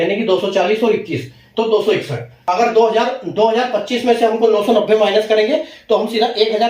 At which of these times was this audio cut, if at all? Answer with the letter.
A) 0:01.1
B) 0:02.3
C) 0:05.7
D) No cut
B